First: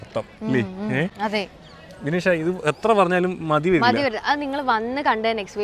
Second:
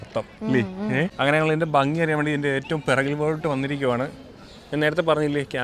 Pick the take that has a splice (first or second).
second